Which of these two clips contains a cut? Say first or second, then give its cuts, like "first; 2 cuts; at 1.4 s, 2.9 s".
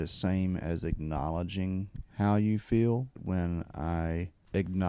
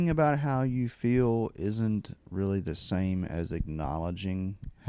first; 1 cut; at 3.2 s